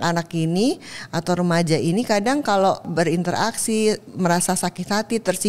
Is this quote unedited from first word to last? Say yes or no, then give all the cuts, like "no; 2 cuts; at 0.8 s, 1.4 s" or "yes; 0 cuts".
no; 1 cut; at 2.9 s